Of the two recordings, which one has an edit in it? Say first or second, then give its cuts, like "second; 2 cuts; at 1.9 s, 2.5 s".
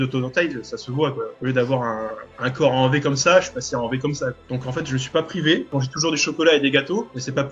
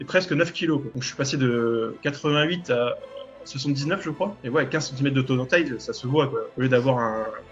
first; 2 cuts; at 4.5 s, 5.7 s